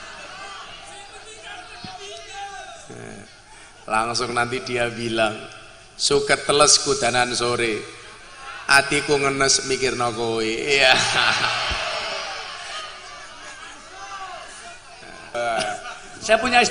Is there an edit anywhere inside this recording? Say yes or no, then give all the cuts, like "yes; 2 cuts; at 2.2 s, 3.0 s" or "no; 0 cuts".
yes; 1 cut; at 15.3 s